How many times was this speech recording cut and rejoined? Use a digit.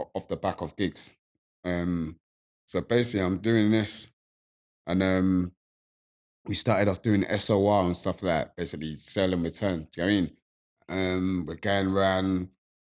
0